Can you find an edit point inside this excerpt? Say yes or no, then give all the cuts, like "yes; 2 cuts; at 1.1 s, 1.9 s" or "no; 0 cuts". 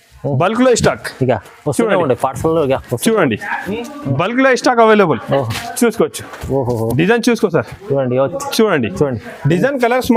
no; 0 cuts